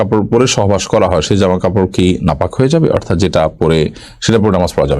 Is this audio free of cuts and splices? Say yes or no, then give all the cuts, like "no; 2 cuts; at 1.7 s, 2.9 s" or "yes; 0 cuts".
yes; 0 cuts